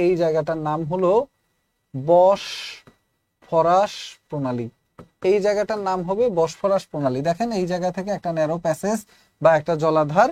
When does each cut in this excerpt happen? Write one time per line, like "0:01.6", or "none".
none